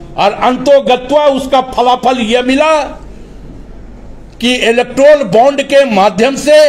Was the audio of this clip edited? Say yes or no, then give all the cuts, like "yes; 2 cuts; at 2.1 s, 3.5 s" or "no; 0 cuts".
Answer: no; 0 cuts